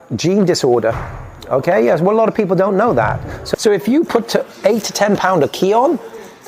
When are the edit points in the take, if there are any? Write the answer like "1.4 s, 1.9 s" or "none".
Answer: 3.4 s